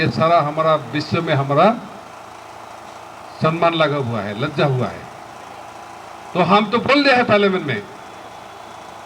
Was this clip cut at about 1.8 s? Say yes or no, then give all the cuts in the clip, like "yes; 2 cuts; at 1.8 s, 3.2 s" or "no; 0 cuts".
no; 0 cuts